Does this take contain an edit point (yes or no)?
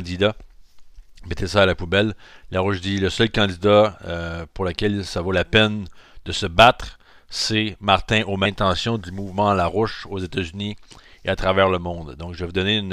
no